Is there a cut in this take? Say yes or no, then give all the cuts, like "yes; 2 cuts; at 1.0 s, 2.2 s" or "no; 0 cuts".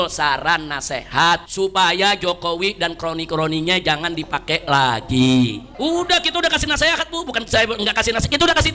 yes; 2 cuts; at 1.5 s, 5.6 s